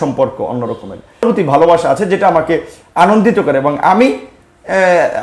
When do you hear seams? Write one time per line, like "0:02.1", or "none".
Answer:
0:01.2